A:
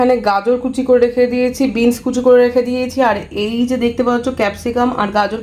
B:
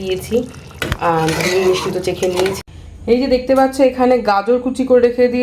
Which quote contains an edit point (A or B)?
B